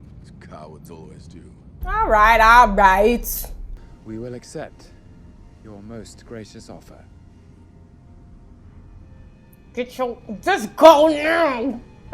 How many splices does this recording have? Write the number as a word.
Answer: zero